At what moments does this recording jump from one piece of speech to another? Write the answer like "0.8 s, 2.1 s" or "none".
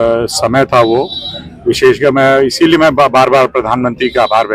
none